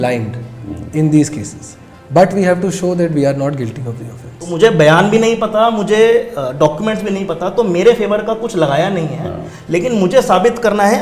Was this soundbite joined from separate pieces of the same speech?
yes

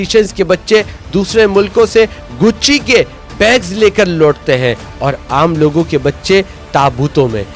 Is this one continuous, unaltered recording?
yes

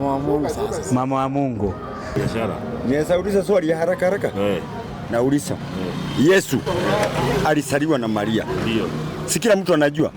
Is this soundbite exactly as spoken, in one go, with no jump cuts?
no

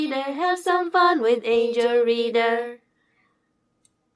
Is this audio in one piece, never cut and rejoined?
yes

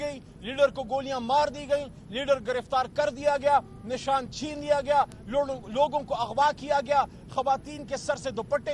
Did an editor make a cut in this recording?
no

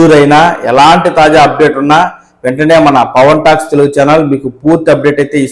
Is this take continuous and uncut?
yes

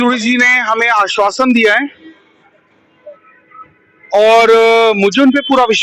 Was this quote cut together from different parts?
no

